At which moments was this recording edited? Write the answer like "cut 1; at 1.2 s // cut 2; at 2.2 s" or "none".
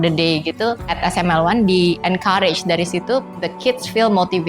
cut 1; at 3.4 s